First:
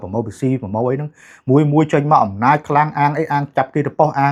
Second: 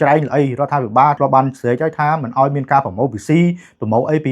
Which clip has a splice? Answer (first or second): second